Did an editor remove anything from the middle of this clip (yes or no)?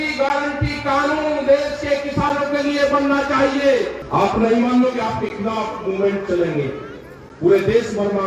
yes